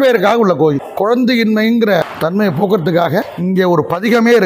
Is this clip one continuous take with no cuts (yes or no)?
no